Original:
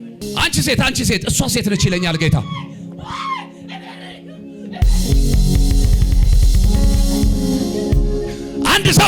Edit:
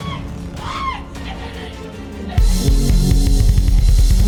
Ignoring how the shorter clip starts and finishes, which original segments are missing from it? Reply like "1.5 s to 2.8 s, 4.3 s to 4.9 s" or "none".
none